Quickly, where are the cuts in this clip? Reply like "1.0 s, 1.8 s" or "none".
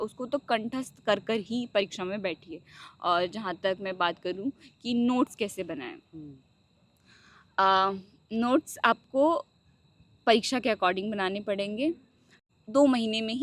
12.4 s